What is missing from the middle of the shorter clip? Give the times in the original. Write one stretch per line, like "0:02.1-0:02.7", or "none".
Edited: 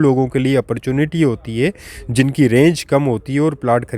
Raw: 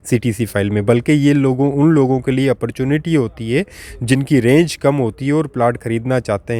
none